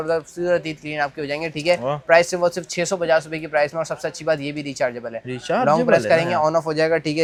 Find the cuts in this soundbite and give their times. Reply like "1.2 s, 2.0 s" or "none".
none